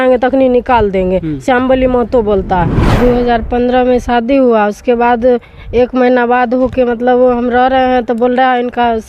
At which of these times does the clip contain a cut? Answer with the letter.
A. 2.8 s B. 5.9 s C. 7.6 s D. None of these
A